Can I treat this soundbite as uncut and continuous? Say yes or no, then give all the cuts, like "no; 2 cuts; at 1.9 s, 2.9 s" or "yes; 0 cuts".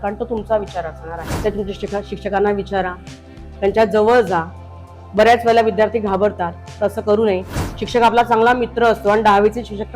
no; 1 cut; at 1.2 s